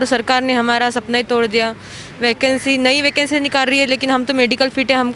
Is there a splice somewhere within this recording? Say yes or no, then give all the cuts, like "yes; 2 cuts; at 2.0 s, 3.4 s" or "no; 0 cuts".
no; 0 cuts